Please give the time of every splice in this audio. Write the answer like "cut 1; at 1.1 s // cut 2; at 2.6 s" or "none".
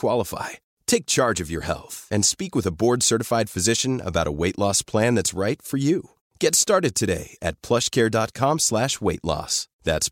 none